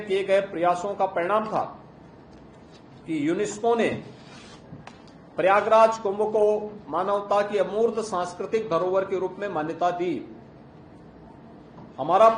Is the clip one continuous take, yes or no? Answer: yes